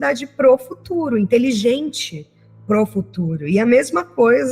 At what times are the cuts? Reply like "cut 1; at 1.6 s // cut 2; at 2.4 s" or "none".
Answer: none